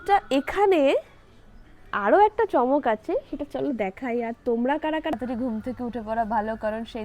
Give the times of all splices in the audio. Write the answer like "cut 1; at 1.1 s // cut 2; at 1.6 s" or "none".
cut 1; at 5.1 s